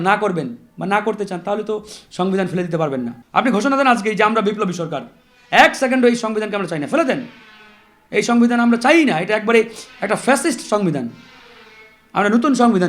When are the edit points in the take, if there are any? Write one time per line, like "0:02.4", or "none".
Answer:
0:03.2